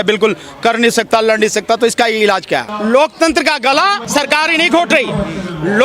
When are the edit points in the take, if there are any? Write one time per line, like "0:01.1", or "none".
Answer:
0:02.7